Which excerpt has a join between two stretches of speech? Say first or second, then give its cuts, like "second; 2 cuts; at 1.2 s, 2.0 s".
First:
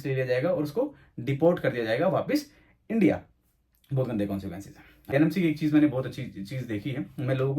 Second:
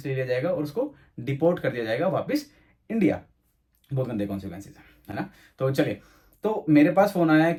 first; 1 cut; at 5.1 s